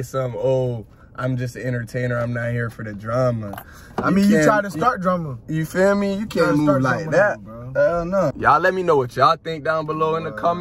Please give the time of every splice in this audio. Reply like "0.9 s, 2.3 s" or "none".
8.4 s